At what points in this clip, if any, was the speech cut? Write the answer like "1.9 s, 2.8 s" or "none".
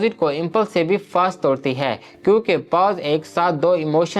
none